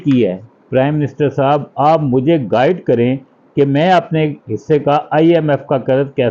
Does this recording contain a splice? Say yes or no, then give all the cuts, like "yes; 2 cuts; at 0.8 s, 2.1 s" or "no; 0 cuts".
no; 0 cuts